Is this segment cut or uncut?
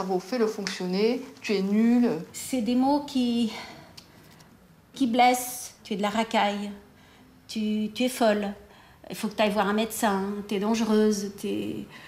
cut